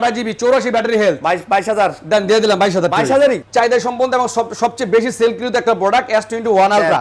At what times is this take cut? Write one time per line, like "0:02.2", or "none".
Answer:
0:03.4